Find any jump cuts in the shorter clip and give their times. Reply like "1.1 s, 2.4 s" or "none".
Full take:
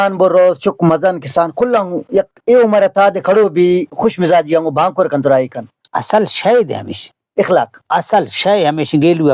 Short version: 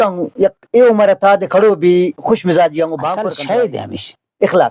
3.2 s